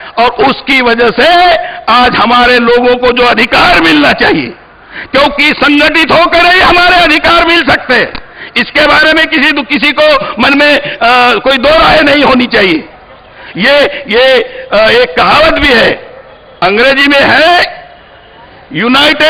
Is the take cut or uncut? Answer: uncut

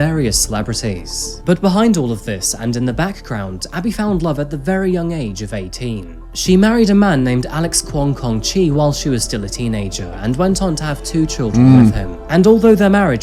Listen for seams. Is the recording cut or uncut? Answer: uncut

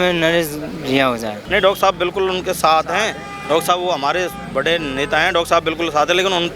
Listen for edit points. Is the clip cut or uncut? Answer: cut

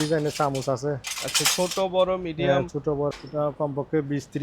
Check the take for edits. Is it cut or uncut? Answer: cut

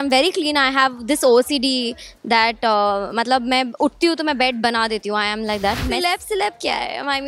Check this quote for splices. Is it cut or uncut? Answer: cut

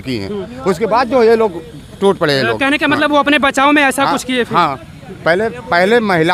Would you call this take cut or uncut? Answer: uncut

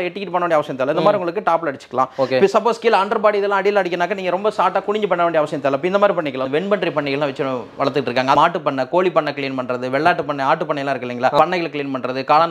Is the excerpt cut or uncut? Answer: cut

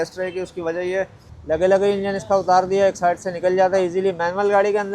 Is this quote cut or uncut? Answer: cut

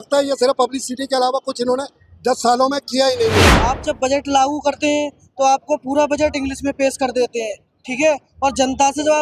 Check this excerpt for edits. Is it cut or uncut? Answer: cut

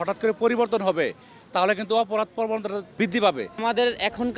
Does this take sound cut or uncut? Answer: cut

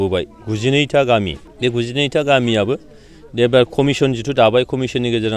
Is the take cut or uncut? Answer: cut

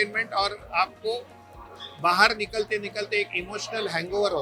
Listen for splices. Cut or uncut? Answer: uncut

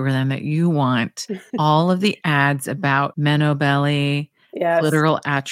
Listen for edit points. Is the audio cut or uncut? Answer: uncut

